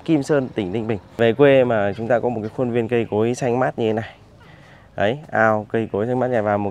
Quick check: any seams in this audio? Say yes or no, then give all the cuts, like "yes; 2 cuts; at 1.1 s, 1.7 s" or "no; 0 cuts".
yes; 1 cut; at 1.2 s